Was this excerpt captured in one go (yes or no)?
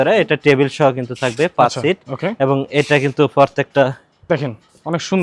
yes